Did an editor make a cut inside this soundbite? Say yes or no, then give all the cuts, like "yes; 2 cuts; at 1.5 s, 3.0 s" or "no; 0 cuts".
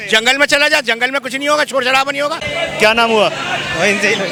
no; 0 cuts